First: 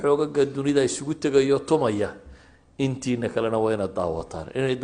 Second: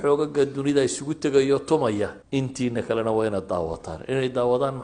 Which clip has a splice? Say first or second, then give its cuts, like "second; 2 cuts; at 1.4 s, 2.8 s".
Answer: second; 1 cut; at 2.2 s